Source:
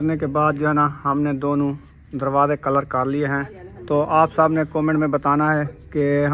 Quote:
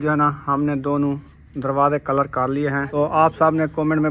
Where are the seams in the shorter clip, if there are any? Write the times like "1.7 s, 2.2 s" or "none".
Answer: 2.9 s